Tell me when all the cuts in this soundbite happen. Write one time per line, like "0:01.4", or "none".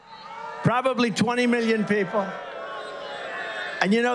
0:02.9